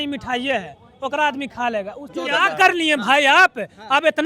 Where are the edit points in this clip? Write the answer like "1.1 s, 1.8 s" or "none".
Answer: 2.1 s